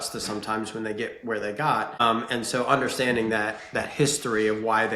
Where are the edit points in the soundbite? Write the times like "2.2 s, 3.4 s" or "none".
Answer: 2.0 s